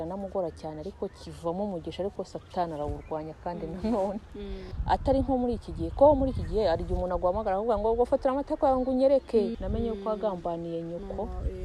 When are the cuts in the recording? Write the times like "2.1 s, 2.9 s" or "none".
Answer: 4.7 s, 9.5 s